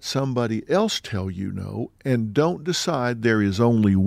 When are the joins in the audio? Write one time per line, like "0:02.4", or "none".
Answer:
none